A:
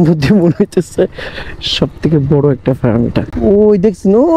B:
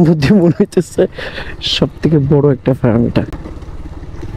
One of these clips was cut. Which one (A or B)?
A